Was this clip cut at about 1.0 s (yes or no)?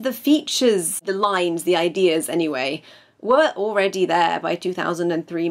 yes